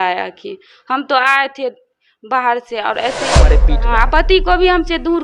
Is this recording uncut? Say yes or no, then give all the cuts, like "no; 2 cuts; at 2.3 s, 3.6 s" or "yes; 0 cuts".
no; 1 cut; at 3.6 s